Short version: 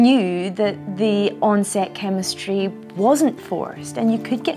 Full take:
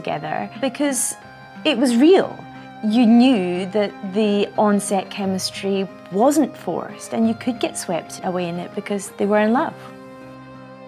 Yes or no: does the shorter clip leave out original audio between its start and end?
no